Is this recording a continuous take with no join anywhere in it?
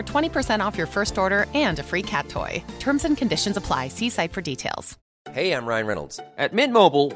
no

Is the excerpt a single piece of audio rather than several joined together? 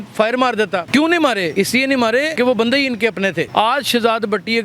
no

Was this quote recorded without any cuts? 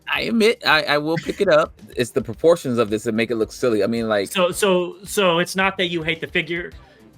no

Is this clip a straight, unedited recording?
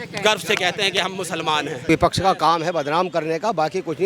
no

